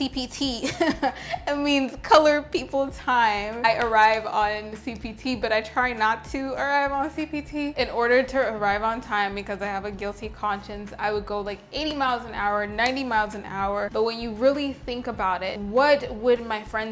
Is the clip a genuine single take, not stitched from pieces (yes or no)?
yes